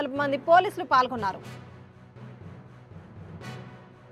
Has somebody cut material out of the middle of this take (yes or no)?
no